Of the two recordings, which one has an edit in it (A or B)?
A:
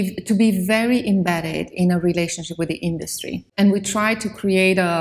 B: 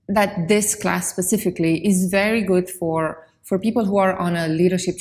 A